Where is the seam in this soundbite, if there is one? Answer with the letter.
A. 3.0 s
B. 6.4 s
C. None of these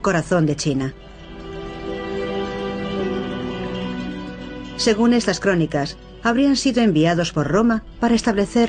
A